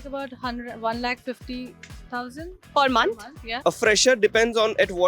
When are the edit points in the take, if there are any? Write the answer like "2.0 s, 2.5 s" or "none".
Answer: 2.6 s, 3.4 s